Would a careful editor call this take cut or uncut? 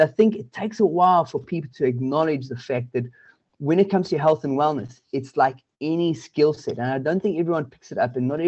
uncut